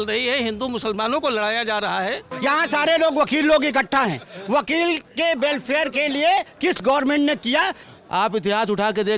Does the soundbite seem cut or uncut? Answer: cut